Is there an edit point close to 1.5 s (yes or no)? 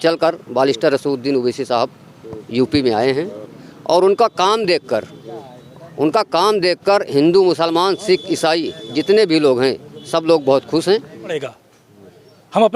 no